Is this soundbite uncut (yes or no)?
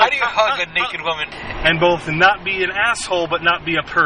no